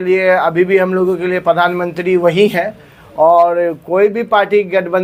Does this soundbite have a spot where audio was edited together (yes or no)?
no